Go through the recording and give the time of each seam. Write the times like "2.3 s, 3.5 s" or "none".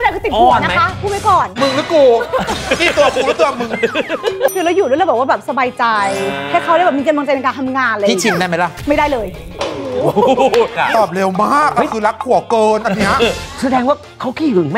4.5 s, 10.8 s